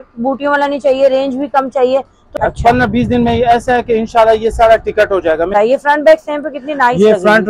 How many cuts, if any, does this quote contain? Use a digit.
2